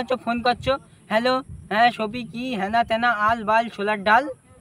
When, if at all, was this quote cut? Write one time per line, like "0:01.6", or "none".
none